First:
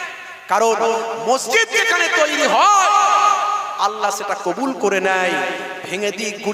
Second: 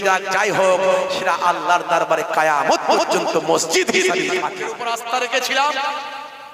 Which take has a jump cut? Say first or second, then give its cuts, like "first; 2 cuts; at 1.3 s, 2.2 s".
second; 1 cut; at 4.6 s